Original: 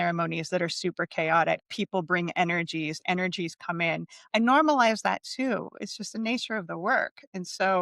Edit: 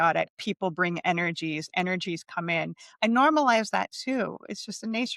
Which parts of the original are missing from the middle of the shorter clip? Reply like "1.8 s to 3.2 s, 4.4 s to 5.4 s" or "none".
none